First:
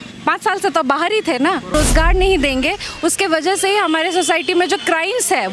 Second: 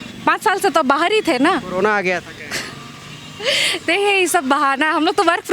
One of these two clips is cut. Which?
first; 1 cut; at 1.7 s

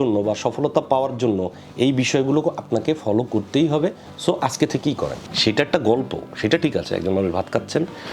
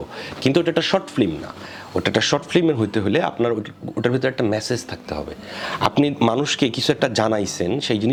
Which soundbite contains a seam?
first; 1 cut; at 5.3 s

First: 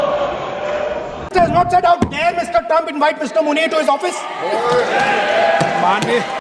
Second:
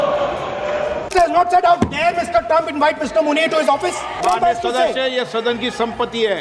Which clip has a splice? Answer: second; 2 cuts; at 1.0 s, 4.2 s

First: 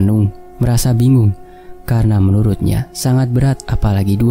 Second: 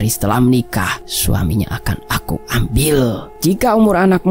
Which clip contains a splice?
second; 2 cuts; at 1.0 s, 3.3 s

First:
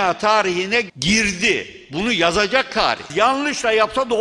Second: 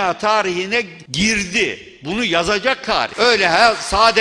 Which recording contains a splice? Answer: first; 2 cuts; at 0.9 s, 3.0 s

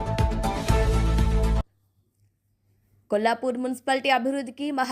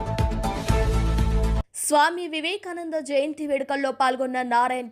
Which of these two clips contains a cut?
first; 1 cut; at 1.7 s

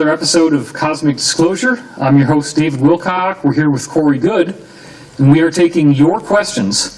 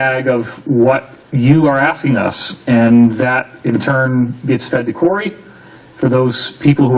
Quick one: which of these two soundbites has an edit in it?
second; 1 cut; at 2.0 s

